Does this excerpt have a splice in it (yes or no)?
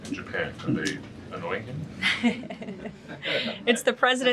no